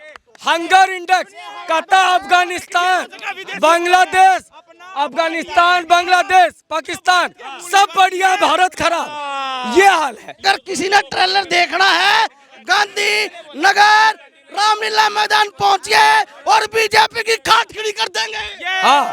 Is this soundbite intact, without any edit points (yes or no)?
no